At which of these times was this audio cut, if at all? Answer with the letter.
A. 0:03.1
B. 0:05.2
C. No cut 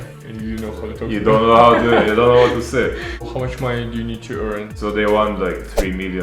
A